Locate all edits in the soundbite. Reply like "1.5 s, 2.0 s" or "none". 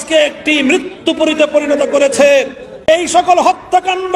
2.9 s